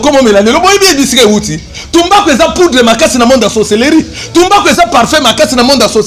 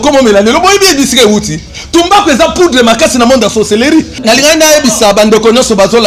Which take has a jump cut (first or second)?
second